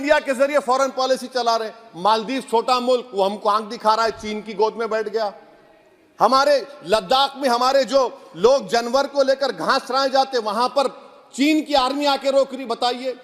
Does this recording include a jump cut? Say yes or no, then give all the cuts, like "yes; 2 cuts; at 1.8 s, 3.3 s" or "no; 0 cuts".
no; 0 cuts